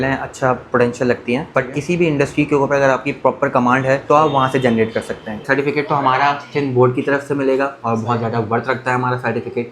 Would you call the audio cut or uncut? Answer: cut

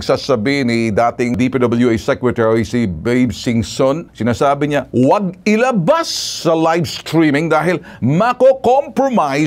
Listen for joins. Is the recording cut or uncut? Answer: cut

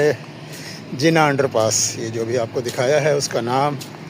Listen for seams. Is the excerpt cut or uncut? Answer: uncut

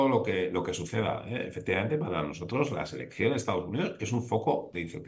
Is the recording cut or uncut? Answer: uncut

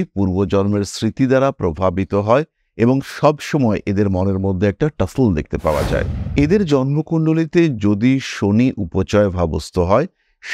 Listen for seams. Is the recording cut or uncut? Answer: uncut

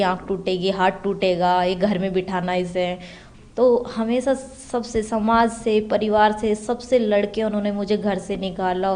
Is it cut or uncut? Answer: uncut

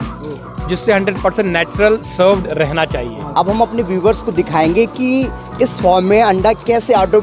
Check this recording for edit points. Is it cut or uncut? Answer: uncut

